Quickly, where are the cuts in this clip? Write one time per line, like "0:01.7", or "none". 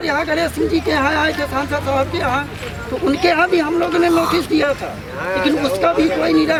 none